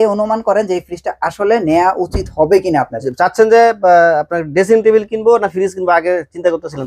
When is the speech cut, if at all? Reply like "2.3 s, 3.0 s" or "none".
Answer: 3.0 s